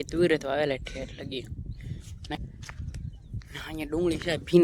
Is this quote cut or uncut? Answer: cut